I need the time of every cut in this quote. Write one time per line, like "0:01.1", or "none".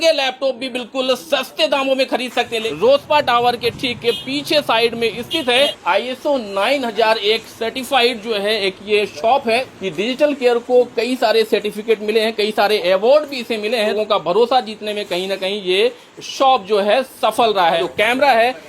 0:02.6
0:05.8
0:09.7
0:13.9
0:17.8